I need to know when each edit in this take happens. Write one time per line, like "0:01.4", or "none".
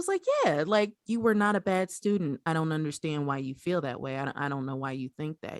0:01.0
0:02.4